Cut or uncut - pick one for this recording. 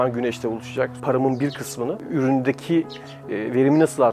cut